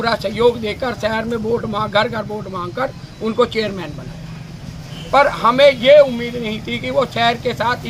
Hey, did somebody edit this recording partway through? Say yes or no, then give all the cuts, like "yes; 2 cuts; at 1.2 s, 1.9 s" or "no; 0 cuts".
no; 0 cuts